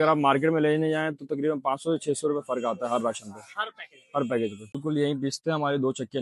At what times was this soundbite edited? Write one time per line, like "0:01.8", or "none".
0:04.8